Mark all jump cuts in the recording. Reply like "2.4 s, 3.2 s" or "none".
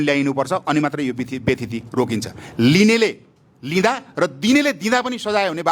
none